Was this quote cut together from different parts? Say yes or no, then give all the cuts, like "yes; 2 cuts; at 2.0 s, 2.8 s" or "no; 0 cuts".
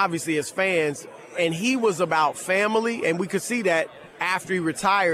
yes; 1 cut; at 4.2 s